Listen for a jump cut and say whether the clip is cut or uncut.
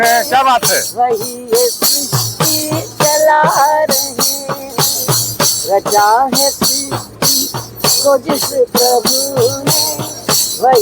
uncut